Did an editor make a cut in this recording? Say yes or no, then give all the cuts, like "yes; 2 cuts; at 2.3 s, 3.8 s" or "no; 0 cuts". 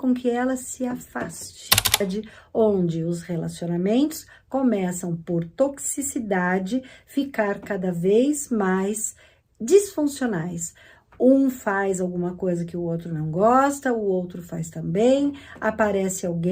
yes; 1 cut; at 2.0 s